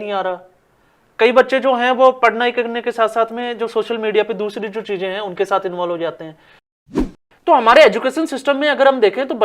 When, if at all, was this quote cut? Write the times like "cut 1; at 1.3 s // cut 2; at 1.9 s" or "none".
cut 1; at 6.8 s